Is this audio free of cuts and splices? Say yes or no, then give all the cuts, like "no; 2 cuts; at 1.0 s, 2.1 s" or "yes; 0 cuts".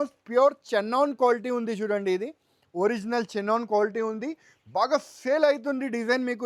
yes; 0 cuts